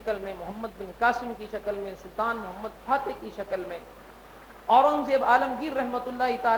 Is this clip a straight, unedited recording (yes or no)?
yes